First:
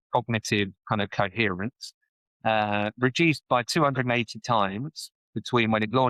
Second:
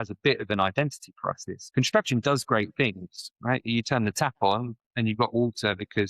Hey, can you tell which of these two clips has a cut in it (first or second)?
second